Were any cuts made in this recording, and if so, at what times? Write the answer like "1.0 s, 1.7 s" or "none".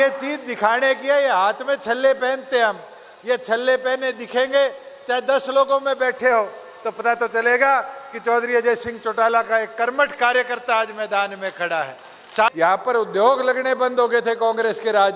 12.5 s